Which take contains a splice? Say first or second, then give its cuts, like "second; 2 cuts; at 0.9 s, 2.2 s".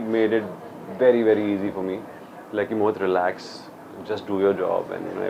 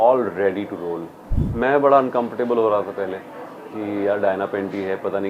second; 1 cut; at 1.1 s